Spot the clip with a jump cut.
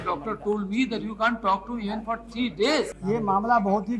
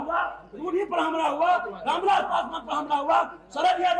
first; 1 cut; at 3.0 s

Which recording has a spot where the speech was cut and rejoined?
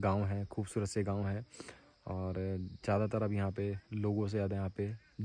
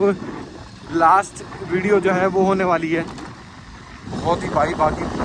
second; 1 cut; at 4.1 s

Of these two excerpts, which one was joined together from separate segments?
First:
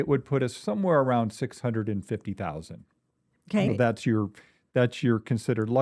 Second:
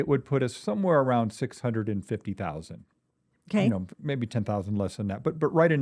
first; 1 cut; at 3.7 s

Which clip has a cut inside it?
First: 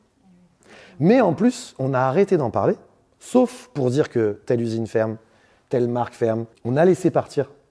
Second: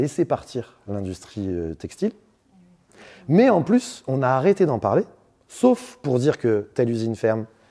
first; 1 cut; at 6.5 s

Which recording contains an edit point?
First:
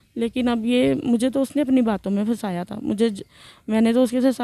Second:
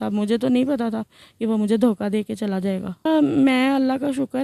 second; 1 cut; at 2.9 s

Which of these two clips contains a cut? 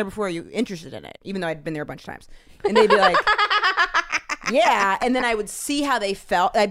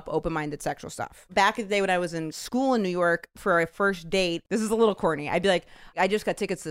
second; 4 cuts; at 1.2 s, 2.3 s, 4.4 s, 6.0 s

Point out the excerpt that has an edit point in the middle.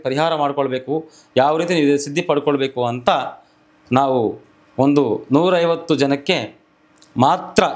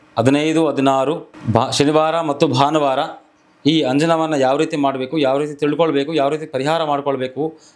second; 1 cut; at 1.3 s

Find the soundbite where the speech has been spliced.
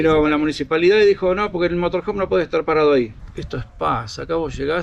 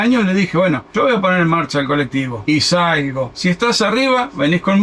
first; 1 cut; at 3.2 s

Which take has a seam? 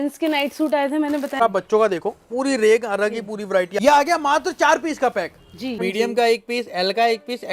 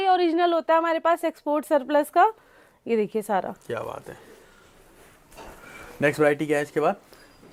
first; 3 cuts; at 1.4 s, 3.7 s, 5.7 s

